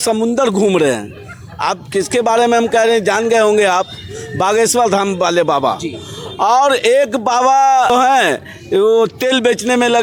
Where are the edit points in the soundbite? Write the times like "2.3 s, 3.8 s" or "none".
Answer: none